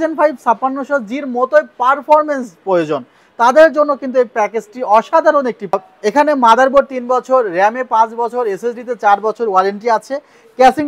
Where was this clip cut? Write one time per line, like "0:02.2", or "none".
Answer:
0:05.8